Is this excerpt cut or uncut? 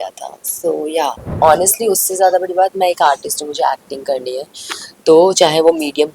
cut